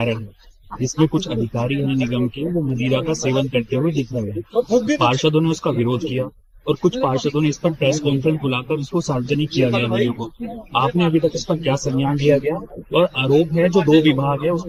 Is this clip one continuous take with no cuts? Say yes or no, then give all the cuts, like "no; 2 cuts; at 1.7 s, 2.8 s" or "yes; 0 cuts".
yes; 0 cuts